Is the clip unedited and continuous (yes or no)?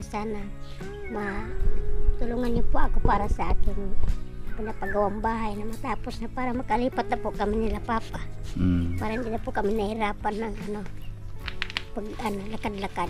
yes